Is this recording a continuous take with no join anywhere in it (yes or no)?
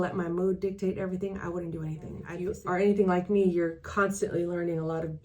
no